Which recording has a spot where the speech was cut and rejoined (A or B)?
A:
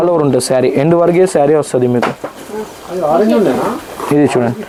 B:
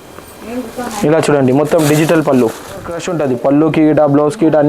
B